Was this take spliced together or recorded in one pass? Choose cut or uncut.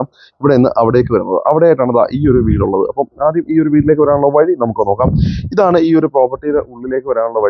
uncut